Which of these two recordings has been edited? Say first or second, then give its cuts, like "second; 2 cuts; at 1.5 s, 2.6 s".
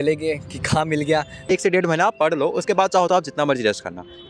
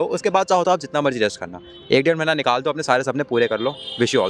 first; 1 cut; at 1.5 s